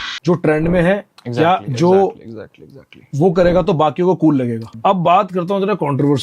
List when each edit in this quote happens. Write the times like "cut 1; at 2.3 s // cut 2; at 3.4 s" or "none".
cut 1; at 4.6 s